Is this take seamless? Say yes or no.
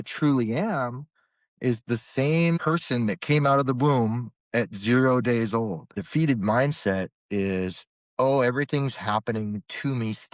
no